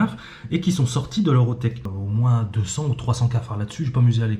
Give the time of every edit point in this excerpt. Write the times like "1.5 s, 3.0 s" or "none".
1.9 s